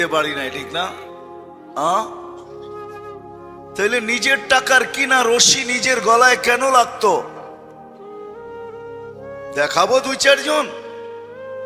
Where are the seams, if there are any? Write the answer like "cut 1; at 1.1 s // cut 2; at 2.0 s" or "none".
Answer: none